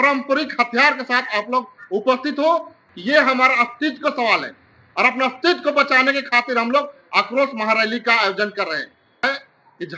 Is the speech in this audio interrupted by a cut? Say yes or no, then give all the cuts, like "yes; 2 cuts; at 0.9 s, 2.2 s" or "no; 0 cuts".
yes; 2 cuts; at 2.8 s, 9.2 s